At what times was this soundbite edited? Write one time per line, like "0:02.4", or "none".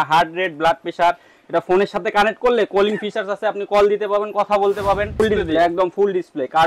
0:05.2